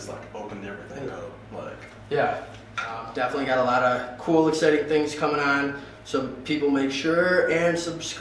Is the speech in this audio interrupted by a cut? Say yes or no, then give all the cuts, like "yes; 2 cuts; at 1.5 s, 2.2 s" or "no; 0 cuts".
yes; 1 cut; at 3.1 s